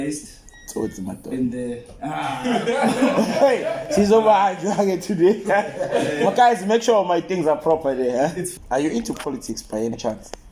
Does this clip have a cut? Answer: yes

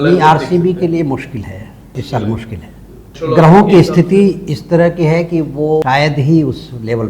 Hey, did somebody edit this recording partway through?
yes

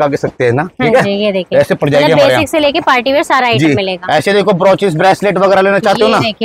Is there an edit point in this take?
no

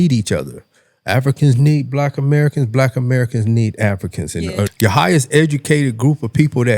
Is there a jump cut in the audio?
yes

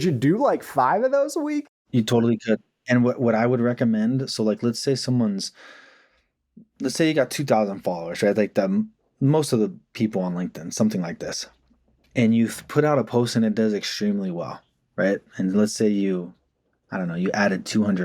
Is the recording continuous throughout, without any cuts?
no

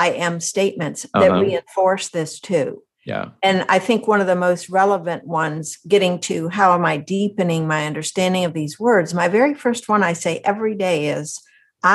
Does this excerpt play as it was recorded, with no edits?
yes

